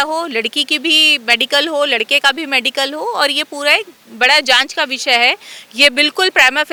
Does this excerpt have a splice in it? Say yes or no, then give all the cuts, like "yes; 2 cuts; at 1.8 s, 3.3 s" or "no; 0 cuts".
no; 0 cuts